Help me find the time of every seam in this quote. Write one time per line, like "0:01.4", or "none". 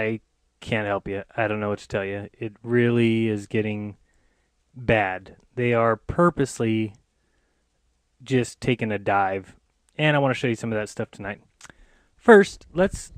0:06.5